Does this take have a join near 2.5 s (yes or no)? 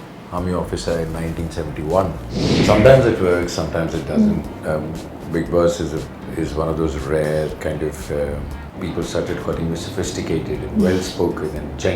yes